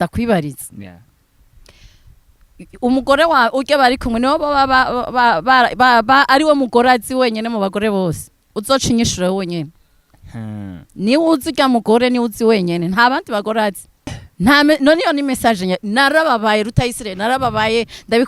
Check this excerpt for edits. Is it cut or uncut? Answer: cut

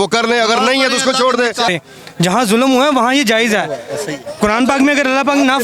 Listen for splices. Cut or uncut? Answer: cut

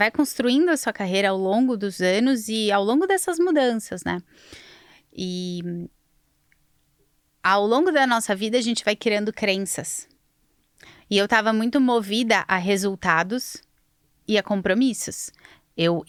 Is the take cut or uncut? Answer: uncut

